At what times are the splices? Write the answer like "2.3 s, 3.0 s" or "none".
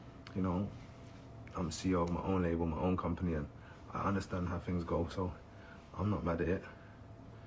3.1 s